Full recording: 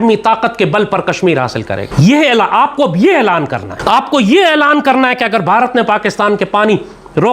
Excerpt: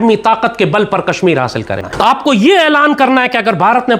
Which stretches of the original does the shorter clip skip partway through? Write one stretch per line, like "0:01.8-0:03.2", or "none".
0:01.8-0:03.7